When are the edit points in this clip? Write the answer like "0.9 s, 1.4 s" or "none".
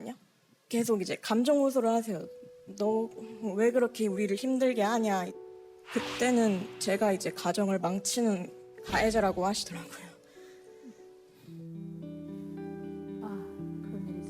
11.4 s